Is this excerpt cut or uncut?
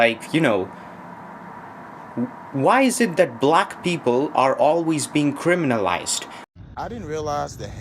cut